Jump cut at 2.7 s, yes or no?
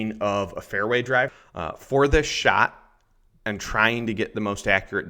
no